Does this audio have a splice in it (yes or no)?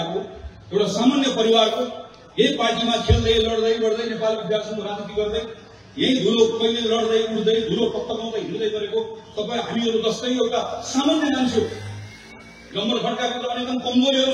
no